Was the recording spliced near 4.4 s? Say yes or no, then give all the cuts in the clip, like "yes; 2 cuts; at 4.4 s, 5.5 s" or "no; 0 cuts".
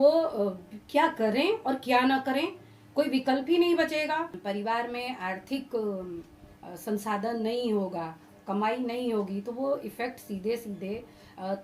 yes; 1 cut; at 4.4 s